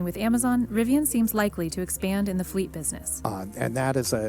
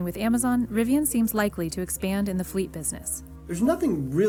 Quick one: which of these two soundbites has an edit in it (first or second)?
first